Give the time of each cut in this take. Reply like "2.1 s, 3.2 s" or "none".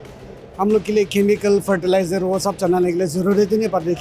none